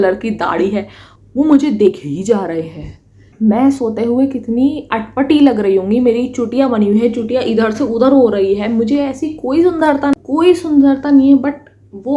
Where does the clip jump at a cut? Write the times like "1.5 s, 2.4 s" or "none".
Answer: 10.2 s